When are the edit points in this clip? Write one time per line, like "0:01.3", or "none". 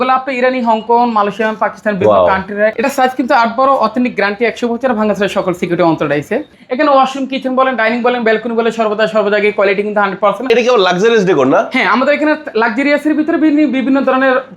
0:02.7
0:06.6
0:10.5